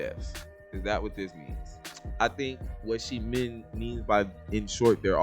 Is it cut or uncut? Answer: cut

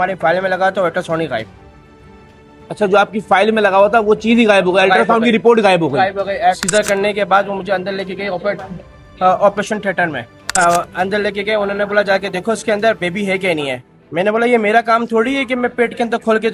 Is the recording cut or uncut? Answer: uncut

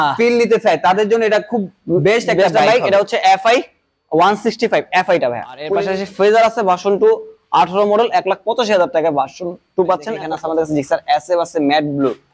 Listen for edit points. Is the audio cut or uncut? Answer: cut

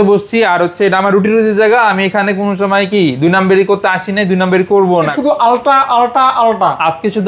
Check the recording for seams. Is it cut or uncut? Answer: cut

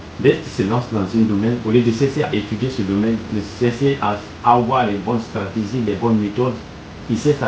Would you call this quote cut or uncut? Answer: uncut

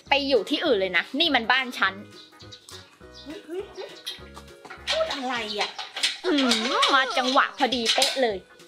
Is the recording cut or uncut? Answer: uncut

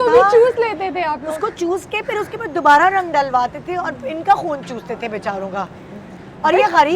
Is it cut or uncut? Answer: uncut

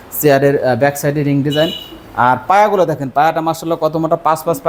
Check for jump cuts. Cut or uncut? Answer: uncut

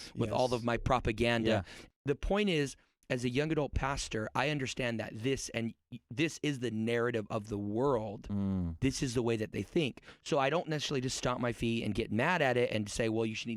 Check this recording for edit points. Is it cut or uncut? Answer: cut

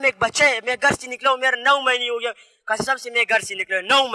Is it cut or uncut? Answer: uncut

